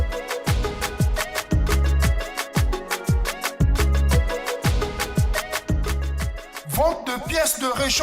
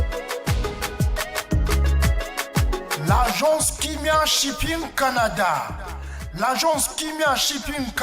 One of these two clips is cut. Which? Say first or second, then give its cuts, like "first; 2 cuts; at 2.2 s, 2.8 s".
second; 1 cut; at 3.0 s